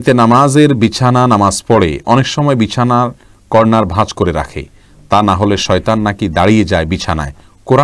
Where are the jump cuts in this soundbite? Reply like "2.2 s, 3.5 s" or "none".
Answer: none